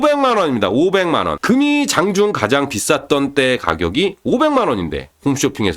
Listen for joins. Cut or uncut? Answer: cut